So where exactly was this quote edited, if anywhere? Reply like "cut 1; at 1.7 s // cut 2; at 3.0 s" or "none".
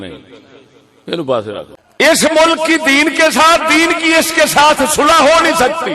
cut 1; at 1.7 s